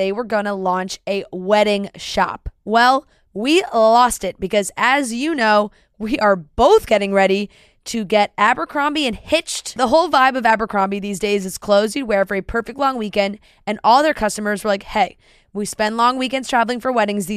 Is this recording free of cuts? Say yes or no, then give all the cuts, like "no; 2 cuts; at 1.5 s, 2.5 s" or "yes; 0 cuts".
yes; 0 cuts